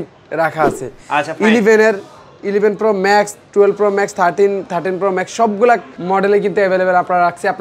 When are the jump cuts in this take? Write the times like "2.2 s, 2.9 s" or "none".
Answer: 5.9 s